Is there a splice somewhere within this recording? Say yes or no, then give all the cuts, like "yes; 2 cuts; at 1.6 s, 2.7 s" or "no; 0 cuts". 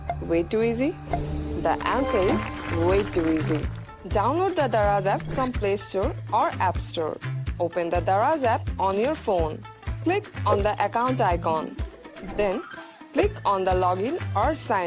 no; 0 cuts